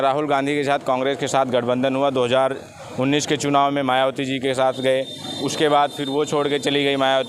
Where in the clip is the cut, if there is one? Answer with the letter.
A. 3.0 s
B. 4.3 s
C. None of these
C